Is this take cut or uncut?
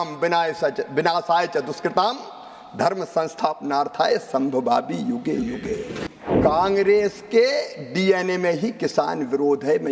cut